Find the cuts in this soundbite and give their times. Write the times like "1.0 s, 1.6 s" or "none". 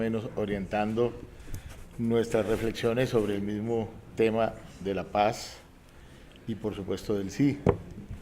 5.5 s